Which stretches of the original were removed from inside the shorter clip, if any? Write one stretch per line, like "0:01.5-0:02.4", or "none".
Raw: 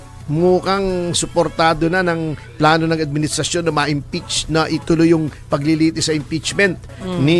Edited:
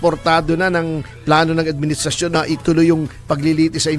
0:03.7-0:04.6